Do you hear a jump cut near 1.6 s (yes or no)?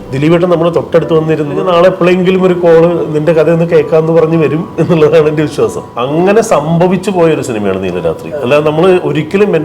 yes